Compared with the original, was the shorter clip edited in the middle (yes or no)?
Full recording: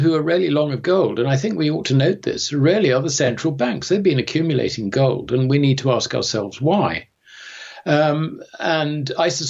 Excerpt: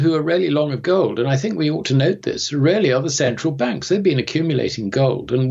no